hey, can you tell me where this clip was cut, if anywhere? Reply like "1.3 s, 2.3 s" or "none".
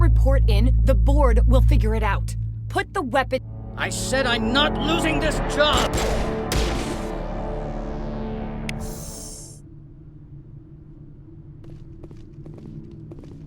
11.7 s